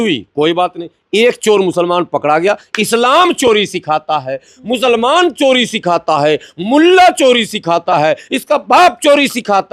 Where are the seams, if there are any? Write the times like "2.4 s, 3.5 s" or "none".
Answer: none